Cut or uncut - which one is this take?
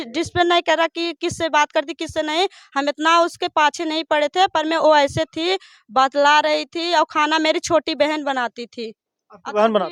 uncut